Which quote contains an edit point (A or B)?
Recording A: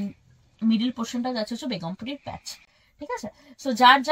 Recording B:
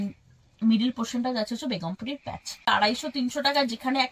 B